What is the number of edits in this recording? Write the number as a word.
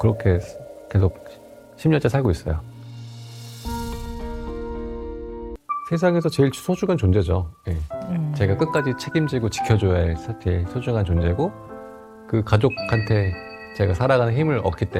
one